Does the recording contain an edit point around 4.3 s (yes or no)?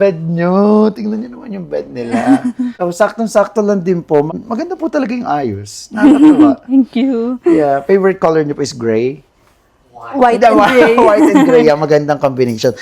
yes